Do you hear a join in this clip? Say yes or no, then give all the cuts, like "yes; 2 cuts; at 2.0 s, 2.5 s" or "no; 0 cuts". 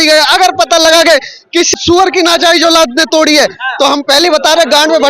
yes; 1 cut; at 1.7 s